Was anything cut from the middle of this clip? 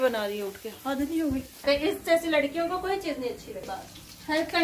yes; 2 cuts; at 1.6 s, 3.6 s

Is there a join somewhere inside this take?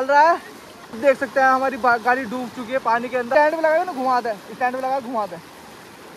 yes; 2 cuts; at 1.0 s, 3.3 s

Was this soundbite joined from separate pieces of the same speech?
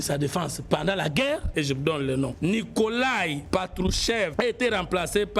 yes; 4 cuts; at 1.5 s, 2.3 s, 3.4 s, 4.3 s

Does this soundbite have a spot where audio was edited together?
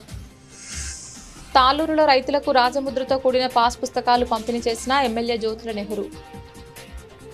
yes; 2 cuts; at 1.5 s, 6.1 s

